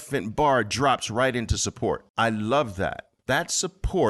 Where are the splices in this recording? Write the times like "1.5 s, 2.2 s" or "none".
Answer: 2.1 s, 3.1 s